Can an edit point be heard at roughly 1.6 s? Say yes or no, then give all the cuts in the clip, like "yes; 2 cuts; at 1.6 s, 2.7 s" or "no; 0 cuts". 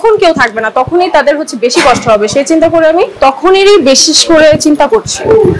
no; 1 cut; at 3.1 s